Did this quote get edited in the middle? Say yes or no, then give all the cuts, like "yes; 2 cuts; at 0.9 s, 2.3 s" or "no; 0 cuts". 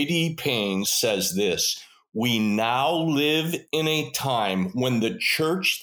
yes; 1 cut; at 0.9 s